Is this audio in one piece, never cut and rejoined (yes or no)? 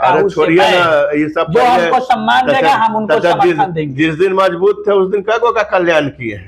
yes